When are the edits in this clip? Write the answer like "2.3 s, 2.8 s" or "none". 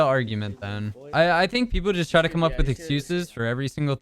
1.0 s